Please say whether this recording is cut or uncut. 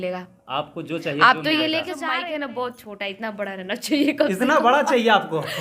cut